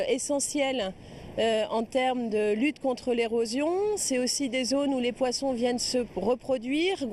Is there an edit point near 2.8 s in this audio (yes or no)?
yes